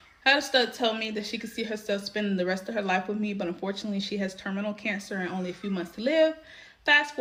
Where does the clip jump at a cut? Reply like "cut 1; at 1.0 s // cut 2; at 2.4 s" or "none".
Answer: none